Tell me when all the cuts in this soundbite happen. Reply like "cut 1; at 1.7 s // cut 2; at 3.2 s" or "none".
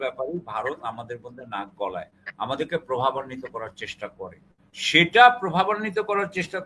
none